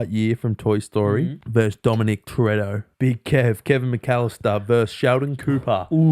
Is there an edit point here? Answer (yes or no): yes